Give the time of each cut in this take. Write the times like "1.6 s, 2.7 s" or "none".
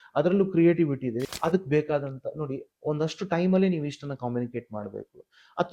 1.3 s